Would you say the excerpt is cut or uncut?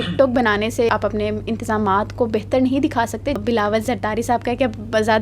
cut